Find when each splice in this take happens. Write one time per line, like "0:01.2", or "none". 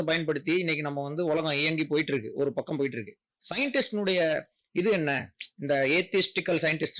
none